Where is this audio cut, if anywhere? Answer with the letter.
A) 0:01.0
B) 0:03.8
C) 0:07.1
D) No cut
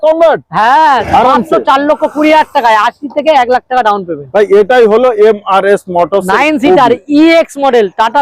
A